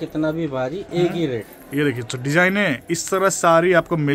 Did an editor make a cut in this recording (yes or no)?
yes